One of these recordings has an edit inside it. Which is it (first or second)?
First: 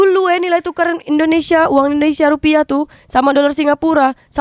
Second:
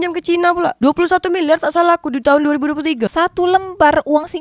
second